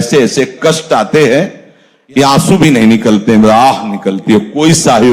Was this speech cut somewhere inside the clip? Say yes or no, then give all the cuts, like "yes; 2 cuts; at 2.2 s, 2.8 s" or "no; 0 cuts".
no; 0 cuts